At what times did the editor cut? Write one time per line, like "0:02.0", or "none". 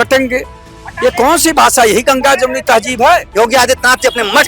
0:03.3